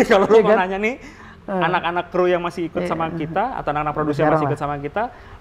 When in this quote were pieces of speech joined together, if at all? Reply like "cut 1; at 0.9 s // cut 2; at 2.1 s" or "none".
none